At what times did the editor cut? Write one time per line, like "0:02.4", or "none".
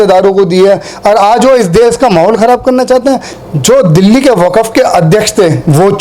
0:03.3